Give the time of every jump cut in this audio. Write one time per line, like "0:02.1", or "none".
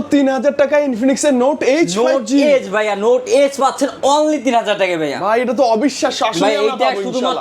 none